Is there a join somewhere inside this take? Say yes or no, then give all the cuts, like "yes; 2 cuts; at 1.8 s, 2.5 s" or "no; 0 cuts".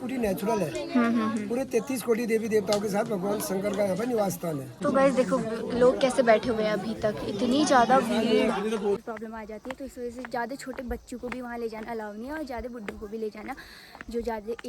yes; 2 cuts; at 4.7 s, 9.0 s